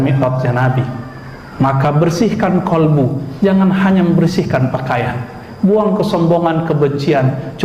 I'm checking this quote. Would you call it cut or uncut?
uncut